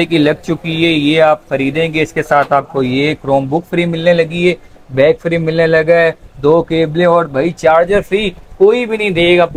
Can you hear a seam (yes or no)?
no